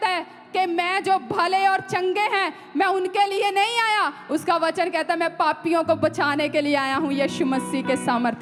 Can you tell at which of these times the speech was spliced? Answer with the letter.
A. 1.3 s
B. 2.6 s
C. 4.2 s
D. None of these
D